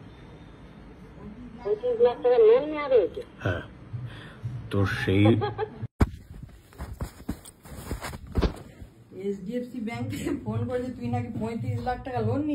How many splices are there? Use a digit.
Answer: 1